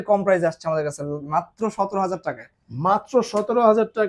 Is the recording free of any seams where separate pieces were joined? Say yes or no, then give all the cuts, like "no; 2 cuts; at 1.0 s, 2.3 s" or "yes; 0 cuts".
yes; 0 cuts